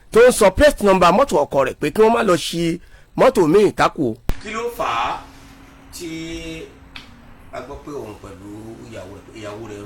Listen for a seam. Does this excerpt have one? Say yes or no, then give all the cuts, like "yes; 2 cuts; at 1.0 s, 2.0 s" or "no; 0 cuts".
yes; 1 cut; at 4.2 s